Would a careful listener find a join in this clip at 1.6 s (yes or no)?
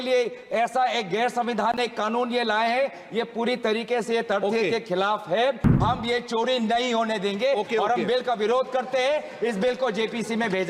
no